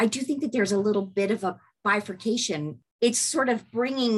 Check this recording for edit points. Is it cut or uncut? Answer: cut